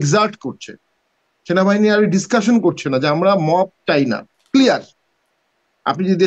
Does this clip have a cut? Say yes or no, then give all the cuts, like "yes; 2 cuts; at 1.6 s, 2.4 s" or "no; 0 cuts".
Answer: no; 0 cuts